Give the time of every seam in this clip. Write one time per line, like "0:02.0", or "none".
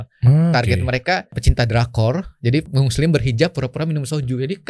0:01.4
0:02.7